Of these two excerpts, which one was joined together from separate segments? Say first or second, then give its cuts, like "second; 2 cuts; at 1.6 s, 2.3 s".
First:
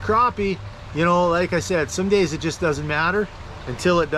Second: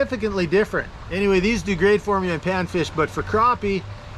second; 1 cut; at 1.0 s